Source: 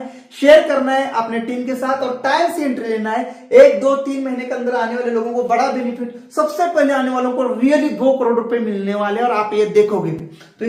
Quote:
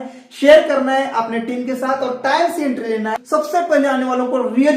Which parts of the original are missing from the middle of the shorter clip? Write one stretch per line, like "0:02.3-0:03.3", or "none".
0:03.2-0:06.2